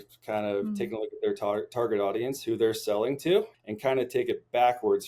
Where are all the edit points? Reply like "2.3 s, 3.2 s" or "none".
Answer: 3.5 s